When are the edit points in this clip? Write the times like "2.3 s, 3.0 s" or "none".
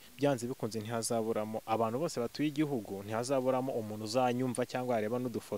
none